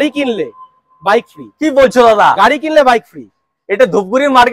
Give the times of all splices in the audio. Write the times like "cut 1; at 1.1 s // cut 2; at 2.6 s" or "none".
none